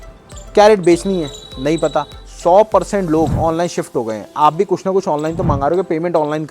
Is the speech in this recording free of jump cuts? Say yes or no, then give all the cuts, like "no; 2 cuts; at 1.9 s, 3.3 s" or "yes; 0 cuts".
no; 1 cut; at 2.2 s